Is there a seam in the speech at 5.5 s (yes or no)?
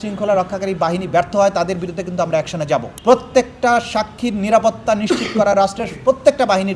no